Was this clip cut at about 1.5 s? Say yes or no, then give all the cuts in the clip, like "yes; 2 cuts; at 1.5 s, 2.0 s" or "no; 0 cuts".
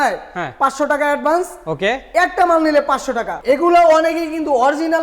no; 1 cut; at 3.3 s